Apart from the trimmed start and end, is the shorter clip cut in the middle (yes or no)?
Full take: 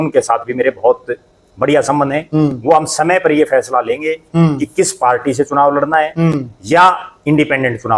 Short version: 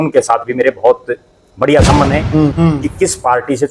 yes